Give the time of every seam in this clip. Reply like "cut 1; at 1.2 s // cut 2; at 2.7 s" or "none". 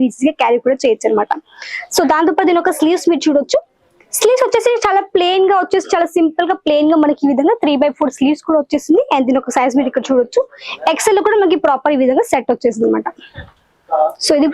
none